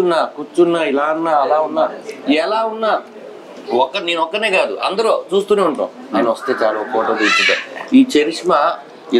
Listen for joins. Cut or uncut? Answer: uncut